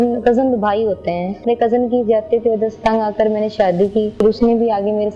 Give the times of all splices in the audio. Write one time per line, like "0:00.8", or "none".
0:01.4
0:04.1